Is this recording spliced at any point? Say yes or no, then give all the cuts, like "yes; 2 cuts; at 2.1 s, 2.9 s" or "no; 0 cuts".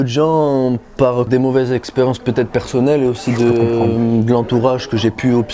yes; 1 cut; at 1.3 s